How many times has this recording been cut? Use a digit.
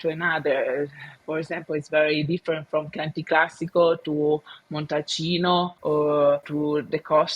2